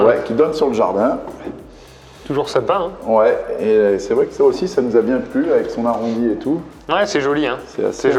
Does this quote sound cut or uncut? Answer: uncut